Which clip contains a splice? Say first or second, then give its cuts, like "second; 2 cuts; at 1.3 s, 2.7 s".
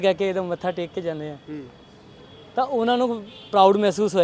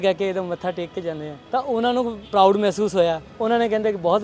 second; 3 cuts; at 1.3 s, 2.2 s, 3.3 s